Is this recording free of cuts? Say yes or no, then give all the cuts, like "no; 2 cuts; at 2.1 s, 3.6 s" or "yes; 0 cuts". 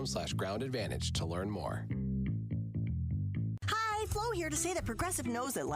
no; 1 cut; at 3.5 s